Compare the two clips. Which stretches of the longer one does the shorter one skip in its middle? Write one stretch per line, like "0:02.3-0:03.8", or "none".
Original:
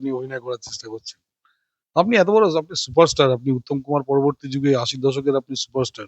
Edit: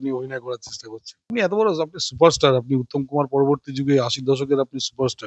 0:01.3-0:02.1